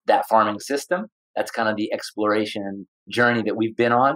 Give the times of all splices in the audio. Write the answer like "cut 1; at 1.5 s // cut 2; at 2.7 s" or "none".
cut 1; at 1.2 s // cut 2; at 3.0 s

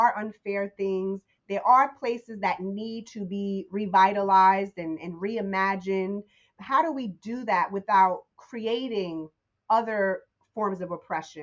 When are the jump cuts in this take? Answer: cut 1; at 6.4 s

